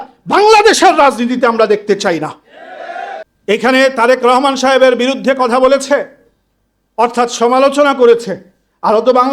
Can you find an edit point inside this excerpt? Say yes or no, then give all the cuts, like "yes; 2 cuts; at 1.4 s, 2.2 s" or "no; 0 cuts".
yes; 1 cut; at 3.2 s